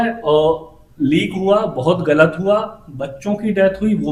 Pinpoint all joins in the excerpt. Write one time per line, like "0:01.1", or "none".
none